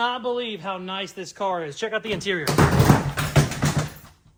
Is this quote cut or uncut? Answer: uncut